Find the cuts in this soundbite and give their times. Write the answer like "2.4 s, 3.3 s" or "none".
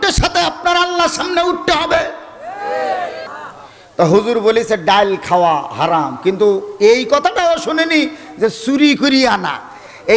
3.2 s